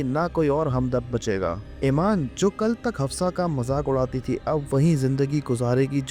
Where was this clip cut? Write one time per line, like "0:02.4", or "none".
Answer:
0:01.7
0:02.3